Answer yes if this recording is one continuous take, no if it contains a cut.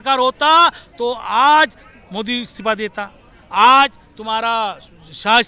yes